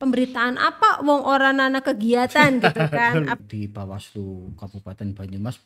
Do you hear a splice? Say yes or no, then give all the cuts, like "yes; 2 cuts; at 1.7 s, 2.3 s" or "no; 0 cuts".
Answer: yes; 1 cut; at 3.4 s